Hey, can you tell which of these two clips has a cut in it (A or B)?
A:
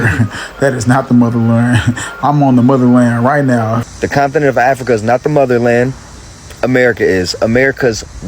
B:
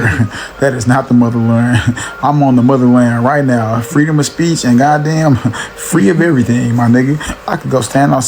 A